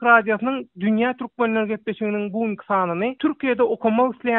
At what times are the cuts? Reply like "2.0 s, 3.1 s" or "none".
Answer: 3.2 s